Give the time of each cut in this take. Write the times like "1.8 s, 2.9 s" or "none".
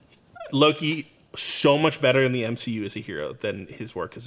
none